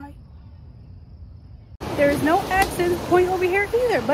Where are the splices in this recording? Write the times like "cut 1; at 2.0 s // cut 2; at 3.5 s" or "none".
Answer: cut 1; at 1.7 s